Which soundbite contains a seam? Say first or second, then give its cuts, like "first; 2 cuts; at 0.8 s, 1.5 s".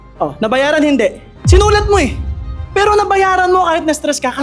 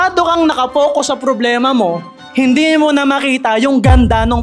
first; 1 cut; at 2.6 s